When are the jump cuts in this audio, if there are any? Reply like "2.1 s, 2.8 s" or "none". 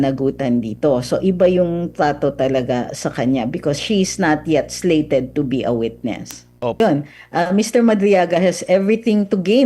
6.8 s

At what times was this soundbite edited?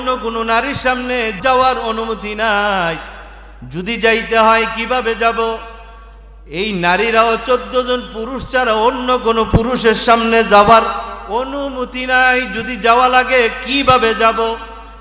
1.3 s

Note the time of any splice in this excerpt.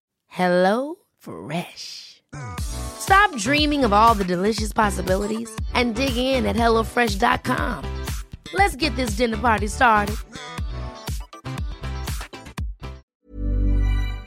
13.1 s

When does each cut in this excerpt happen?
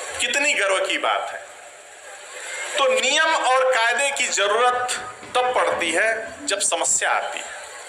2.6 s

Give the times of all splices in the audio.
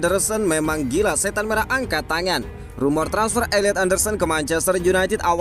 none

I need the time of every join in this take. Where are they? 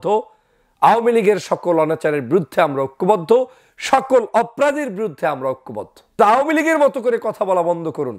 6.2 s

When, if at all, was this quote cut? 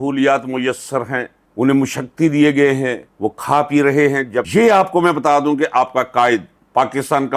4.5 s

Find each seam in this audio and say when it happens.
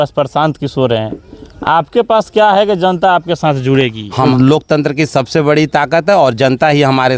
4.3 s

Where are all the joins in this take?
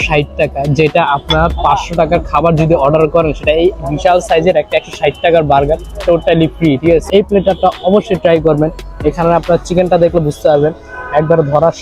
7.0 s

